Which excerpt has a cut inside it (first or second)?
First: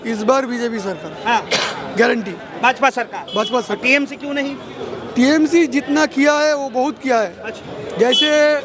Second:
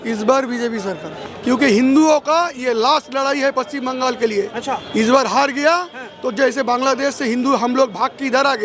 second